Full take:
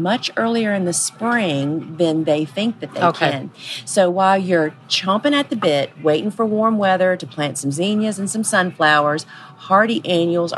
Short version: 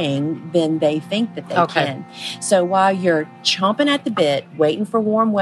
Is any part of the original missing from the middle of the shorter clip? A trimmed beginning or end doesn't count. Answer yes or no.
no